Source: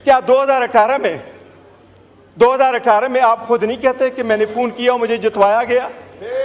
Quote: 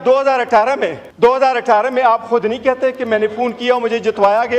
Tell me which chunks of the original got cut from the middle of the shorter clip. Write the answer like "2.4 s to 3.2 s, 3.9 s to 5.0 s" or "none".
1.3 s to 2.2 s